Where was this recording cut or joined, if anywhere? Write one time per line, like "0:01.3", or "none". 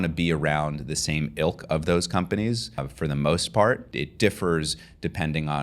0:02.9
0:03.9